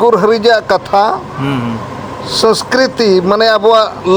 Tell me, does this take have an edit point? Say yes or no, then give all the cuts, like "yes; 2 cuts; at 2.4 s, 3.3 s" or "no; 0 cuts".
no; 0 cuts